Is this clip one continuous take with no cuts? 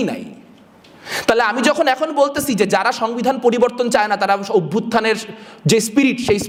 yes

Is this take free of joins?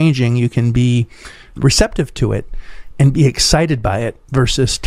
yes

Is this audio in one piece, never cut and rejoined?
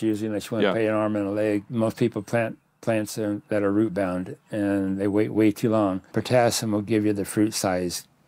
no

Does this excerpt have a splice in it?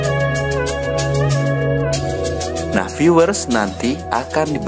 no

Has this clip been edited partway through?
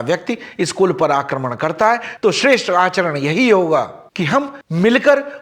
no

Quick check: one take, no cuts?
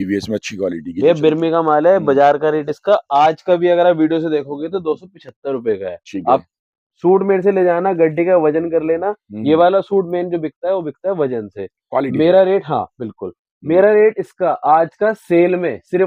yes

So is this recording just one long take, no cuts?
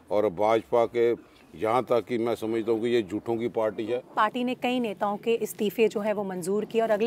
no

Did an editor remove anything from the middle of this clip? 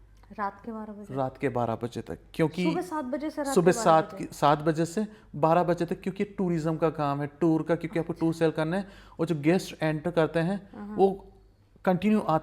no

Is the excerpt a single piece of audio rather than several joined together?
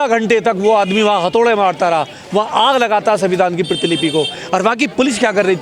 yes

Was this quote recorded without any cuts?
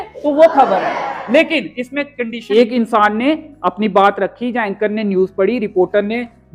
no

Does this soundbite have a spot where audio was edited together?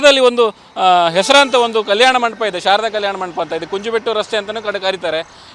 no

